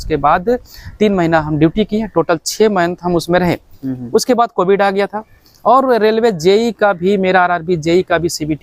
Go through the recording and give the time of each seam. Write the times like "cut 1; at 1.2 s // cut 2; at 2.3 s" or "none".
none